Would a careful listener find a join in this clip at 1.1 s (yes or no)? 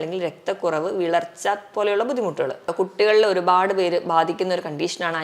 no